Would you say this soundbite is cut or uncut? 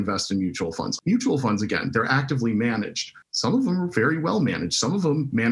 uncut